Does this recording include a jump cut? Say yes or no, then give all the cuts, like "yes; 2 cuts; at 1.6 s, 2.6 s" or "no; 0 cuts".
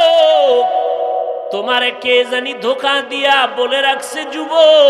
yes; 1 cut; at 1.6 s